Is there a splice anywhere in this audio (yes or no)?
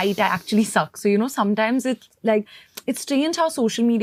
no